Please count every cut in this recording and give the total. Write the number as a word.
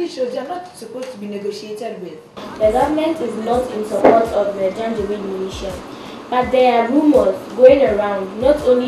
one